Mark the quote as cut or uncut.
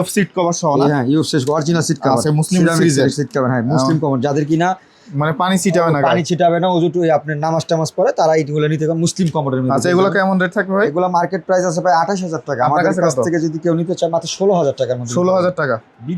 uncut